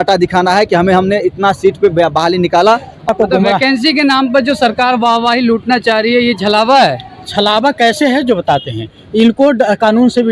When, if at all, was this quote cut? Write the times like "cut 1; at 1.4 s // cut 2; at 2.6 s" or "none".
cut 1; at 3.1 s